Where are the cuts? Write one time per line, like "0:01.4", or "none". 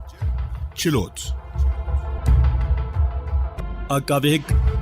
0:01.2

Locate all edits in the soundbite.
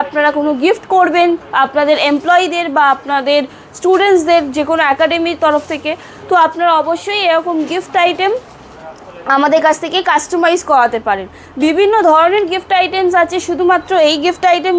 none

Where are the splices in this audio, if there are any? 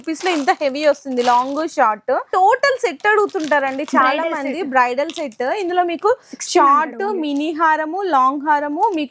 0:02.3

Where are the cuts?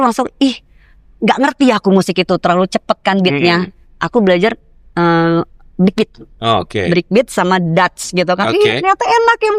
none

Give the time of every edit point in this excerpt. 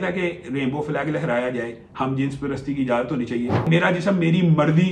0:03.7

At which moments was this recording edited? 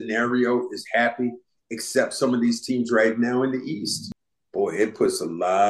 0:04.1

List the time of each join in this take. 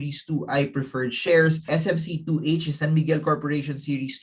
0:01.6

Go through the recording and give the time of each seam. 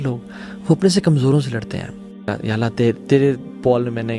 0:02.3

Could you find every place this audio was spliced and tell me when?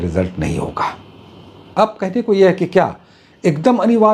0:01.6

